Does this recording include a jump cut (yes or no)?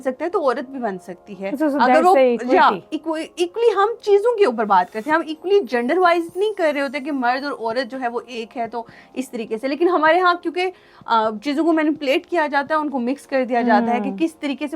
no